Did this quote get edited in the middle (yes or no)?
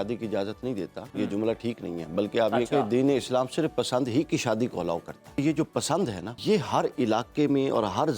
yes